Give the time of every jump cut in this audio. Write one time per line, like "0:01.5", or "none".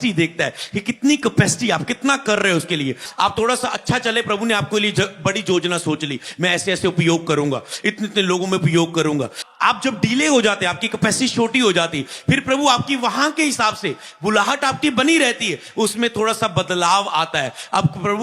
0:03.0
0:09.4